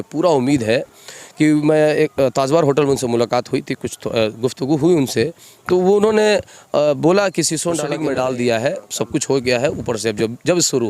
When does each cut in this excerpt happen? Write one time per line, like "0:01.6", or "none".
0:07.9

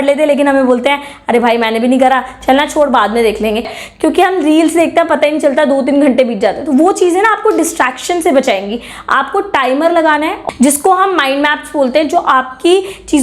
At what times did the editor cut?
0:03.6
0:10.4

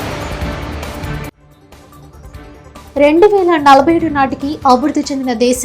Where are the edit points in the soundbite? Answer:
0:01.4

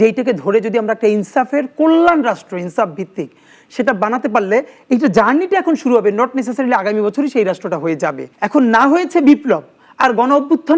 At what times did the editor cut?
0:08.3

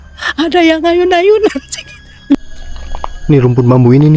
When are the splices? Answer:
0:02.4

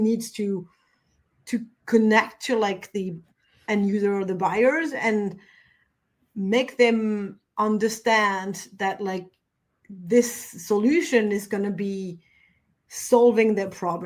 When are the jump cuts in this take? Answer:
none

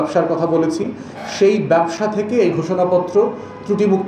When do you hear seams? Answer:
none

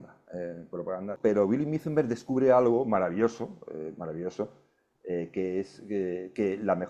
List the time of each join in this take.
0:01.2

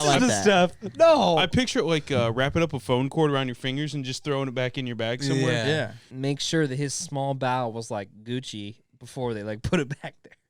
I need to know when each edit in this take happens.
0:06.1

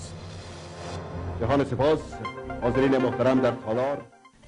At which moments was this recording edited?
0:01.4

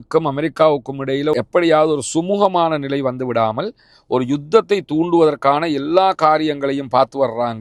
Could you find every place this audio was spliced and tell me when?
none

